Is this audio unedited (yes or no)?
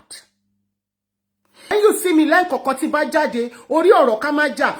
no